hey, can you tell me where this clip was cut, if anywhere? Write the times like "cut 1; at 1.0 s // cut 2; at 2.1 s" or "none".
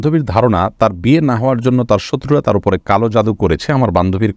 none